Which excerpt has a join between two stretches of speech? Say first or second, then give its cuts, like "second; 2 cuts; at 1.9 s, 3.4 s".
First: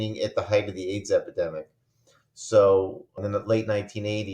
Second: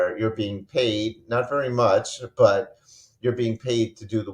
first; 1 cut; at 3.2 s